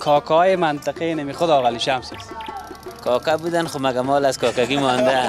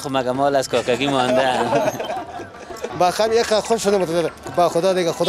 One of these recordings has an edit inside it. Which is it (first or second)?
second